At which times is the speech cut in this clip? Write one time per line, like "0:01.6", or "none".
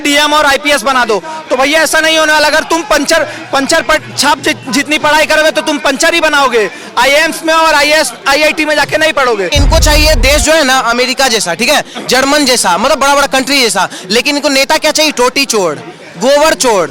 0:09.5